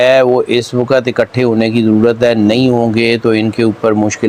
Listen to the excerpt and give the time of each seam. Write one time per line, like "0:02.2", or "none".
none